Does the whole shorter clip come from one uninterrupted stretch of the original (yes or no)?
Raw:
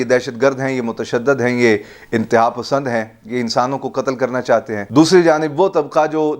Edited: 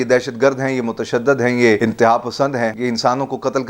no